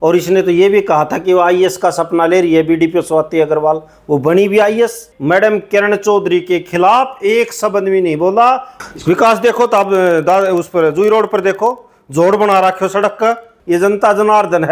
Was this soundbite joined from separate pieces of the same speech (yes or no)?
yes